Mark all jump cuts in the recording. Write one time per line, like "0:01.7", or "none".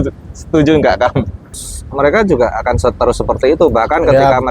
0:01.7

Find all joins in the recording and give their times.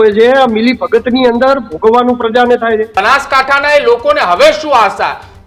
0:02.9

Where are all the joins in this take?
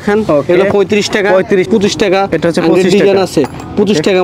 0:01.7

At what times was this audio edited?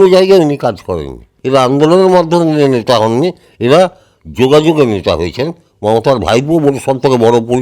0:01.3

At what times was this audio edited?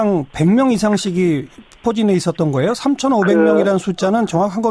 0:00.9

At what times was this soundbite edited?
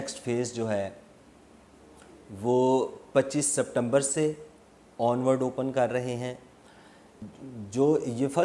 0:07.3

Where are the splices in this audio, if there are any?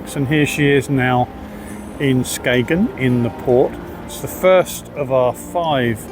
0:04.1

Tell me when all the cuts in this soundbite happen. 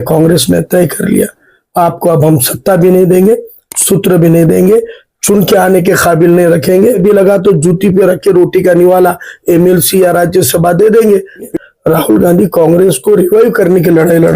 0:07.0
0:11.6

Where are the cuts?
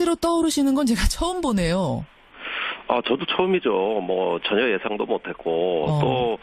0:04.1

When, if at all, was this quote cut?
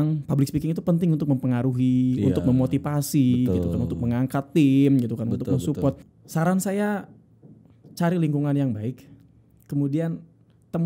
0:06.1

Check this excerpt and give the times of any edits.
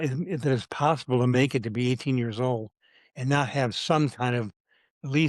none

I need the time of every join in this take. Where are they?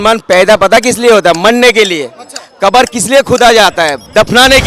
none

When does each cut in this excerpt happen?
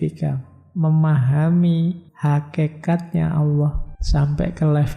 0:02.1
0:03.9

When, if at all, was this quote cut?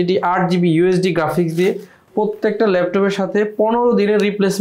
0:01.9

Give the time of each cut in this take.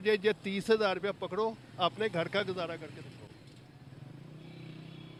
none

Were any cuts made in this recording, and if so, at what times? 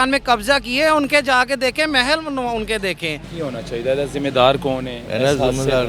0:03.2

